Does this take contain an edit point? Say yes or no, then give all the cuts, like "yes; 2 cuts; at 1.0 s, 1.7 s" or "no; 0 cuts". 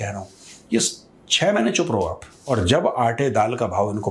yes; 1 cut; at 2.3 s